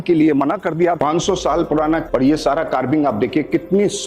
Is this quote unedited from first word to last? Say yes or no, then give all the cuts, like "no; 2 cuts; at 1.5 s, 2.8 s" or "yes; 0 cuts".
no; 2 cuts; at 1.0 s, 2.1 s